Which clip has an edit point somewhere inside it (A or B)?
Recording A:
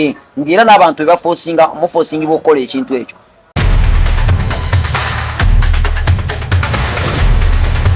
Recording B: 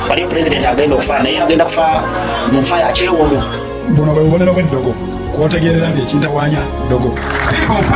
A